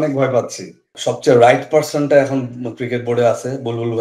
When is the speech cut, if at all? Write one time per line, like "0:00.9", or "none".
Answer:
0:01.0